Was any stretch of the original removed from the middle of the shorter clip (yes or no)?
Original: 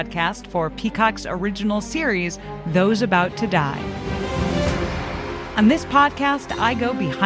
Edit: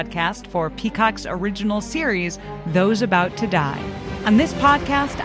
yes